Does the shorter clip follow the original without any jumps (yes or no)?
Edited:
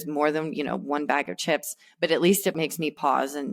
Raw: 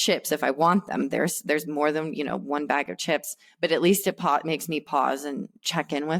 no